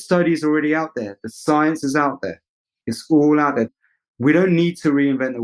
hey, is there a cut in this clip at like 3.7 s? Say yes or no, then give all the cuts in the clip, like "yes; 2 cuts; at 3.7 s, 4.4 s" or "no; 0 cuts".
yes; 1 cut; at 3.7 s